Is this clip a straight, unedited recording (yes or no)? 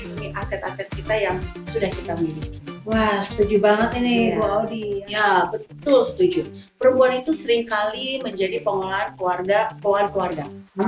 no